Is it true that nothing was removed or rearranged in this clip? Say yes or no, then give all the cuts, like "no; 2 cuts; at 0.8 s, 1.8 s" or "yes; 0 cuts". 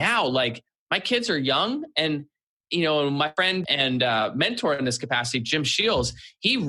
no; 1 cut; at 3.4 s